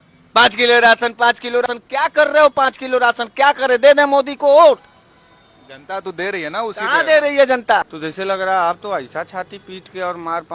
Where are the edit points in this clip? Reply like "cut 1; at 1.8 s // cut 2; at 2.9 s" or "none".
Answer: cut 1; at 1.6 s // cut 2; at 7.9 s